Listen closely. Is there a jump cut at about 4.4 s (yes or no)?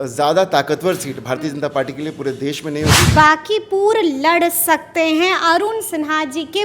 no